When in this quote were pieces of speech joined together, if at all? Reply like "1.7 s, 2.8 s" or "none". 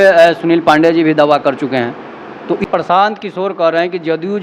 2.8 s